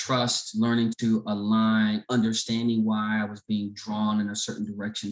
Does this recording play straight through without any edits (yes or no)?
yes